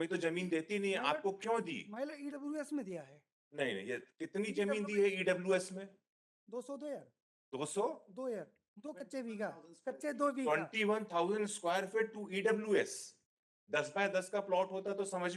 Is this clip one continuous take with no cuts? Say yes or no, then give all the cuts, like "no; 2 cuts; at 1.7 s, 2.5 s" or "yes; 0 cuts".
yes; 0 cuts